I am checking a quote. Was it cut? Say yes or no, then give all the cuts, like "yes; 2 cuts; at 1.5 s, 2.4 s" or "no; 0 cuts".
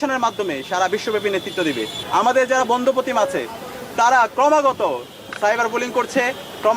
yes; 1 cut; at 1.9 s